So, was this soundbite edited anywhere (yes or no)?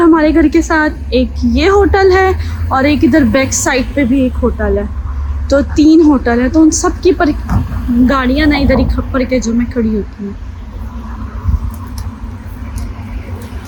no